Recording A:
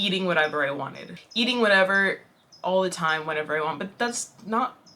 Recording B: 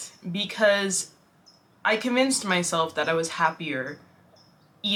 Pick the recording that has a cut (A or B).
A